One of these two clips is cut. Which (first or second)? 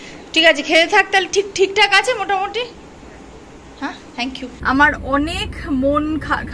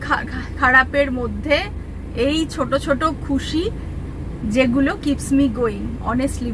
first